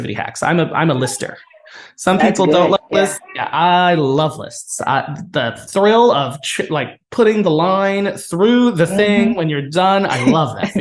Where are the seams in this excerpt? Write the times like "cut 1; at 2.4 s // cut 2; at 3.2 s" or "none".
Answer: none